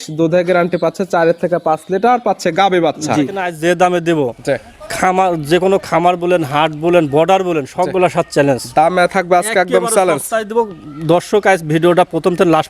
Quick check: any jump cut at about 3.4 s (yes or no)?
yes